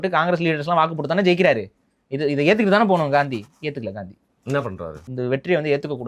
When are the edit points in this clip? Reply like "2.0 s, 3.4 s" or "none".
5.1 s